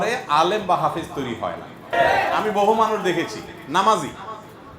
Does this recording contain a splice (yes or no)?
yes